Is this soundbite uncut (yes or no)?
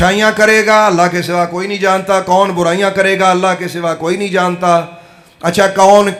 yes